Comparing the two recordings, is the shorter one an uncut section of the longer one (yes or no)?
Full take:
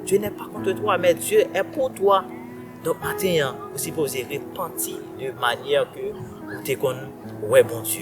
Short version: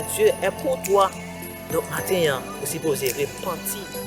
yes